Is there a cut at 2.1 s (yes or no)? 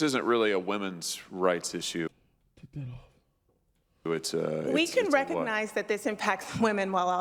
no